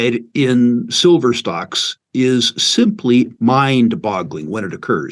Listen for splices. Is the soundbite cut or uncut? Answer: uncut